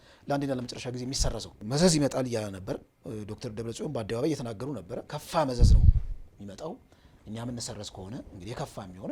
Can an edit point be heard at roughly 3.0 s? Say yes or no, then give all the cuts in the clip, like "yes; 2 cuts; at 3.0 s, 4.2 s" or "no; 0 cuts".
no; 2 cuts; at 1.6 s, 5.1 s